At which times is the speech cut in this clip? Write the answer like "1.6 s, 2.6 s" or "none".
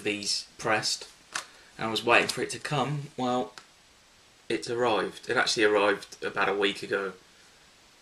3.1 s